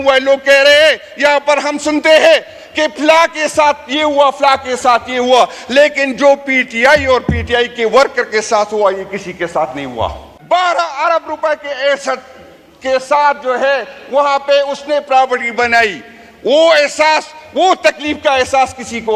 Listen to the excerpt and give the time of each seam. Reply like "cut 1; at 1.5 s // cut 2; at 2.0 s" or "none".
cut 1; at 10.3 s